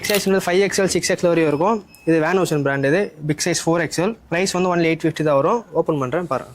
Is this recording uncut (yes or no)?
no